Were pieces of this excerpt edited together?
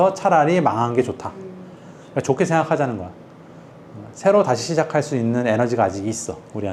no; 0 cuts

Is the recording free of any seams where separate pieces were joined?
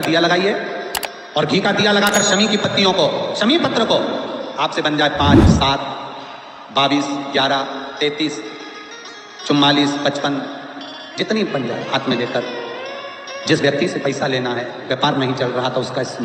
yes; 0 cuts

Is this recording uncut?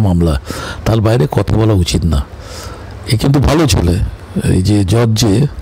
yes; 0 cuts

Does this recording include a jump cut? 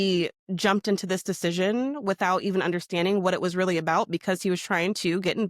no; 0 cuts

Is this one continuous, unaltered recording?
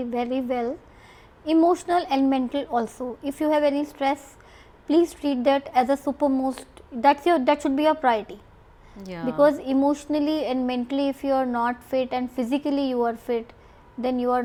yes; 0 cuts

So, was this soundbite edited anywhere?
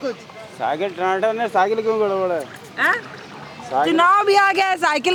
no; 0 cuts

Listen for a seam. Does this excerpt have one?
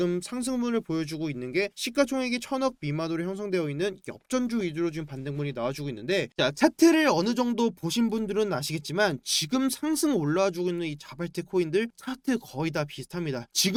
no; 0 cuts

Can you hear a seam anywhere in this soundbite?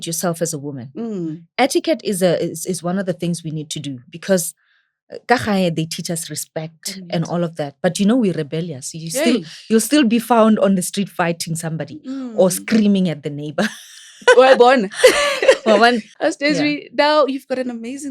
yes; 1 cut; at 16.1 s

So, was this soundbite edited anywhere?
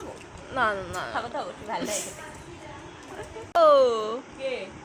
yes; 1 cut; at 3.6 s

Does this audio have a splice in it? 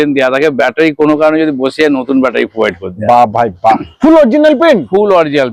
yes; 1 cut; at 3.9 s

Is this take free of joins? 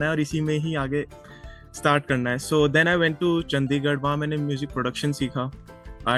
yes; 0 cuts

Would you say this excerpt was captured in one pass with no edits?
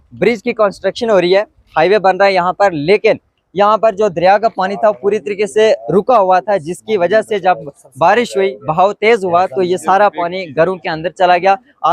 yes; 0 cuts

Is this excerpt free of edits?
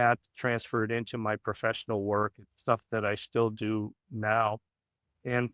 yes; 0 cuts

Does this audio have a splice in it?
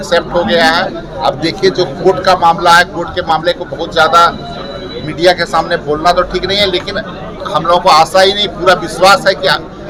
no; 0 cuts

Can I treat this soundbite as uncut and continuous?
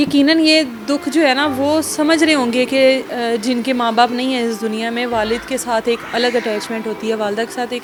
yes; 0 cuts

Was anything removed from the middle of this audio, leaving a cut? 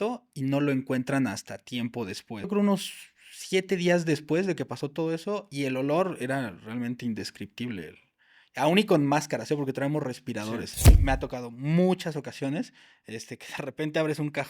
yes; 2 cuts; at 2.5 s, 11.0 s

